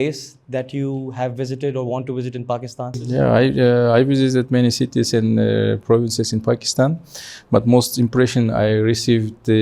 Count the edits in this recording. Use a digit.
1